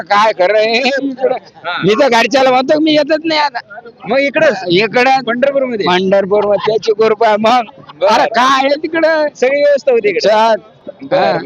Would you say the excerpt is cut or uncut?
uncut